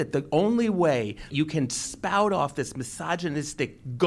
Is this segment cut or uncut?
cut